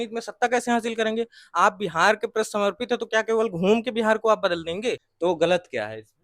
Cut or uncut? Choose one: cut